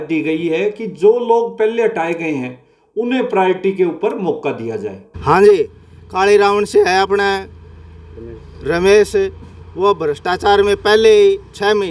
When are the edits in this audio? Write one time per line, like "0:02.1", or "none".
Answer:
0:05.0